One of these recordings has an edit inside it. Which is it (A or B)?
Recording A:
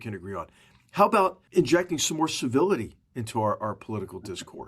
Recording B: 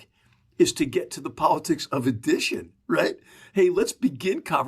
A